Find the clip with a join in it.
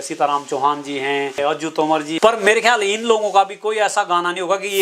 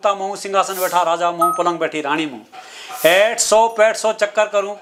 first; 1 cut; at 1.6 s

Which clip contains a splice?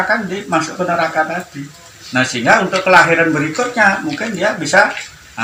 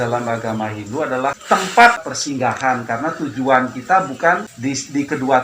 second; 3 cuts; at 1.4 s, 2.1 s, 4.5 s

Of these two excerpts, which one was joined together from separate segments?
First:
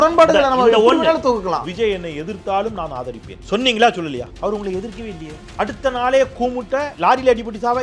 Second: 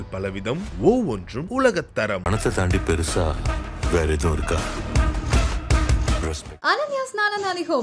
first; 5 cuts; at 1.6 s, 3.3 s, 4.3 s, 5.4 s, 6.9 s

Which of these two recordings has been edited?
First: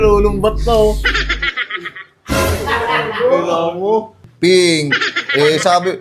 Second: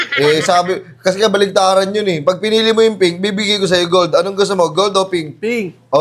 first; 1 cut; at 4.2 s

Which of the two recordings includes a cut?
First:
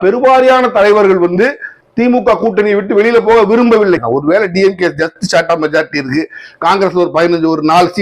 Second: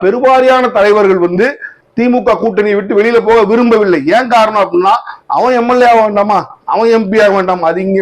first; 1 cut; at 4.0 s

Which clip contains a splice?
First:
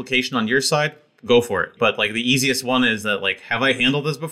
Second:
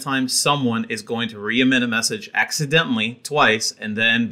first; 1 cut; at 1.7 s

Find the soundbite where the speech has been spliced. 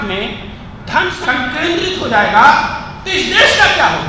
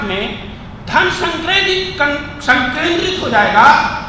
first; 1 cut; at 1.2 s

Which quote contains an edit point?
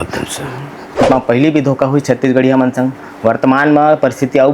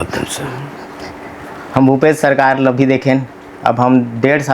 first; 1 cut; at 0.9 s

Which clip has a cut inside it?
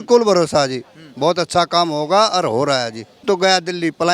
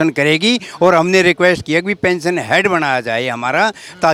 first; 1 cut; at 3.2 s

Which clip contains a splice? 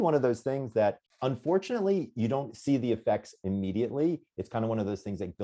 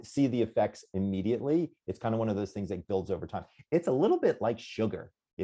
first; 1 cut; at 1.1 s

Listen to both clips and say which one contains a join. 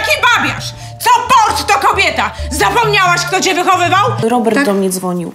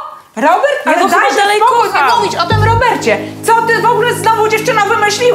first; 1 cut; at 4.2 s

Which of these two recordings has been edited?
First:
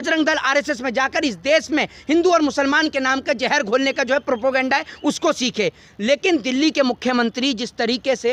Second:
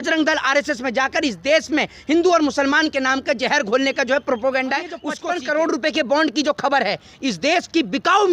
second; 1 cut; at 5.1 s

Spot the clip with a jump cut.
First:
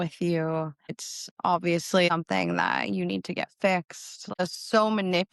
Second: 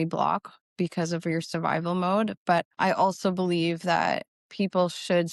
first; 2 cuts; at 2.1 s, 4.4 s

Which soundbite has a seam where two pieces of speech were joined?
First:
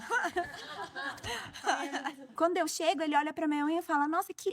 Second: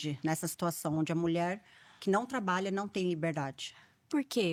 first; 1 cut; at 2.3 s

